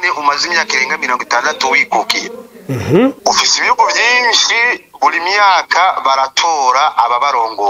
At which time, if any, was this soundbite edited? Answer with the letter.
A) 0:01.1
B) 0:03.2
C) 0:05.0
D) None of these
B